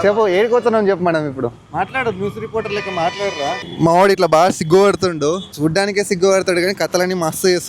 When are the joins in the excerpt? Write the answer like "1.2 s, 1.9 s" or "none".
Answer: 1.6 s, 3.7 s